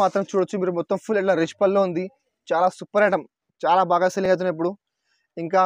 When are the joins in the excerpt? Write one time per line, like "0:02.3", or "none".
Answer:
none